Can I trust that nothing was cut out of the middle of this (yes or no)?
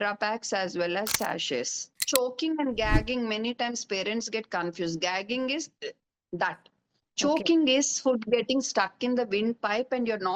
no